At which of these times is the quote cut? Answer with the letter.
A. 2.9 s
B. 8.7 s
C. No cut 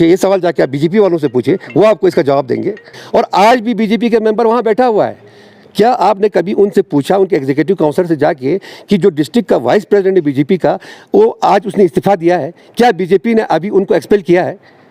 A